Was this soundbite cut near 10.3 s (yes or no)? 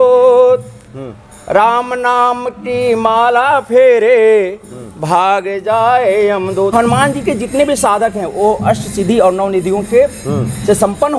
no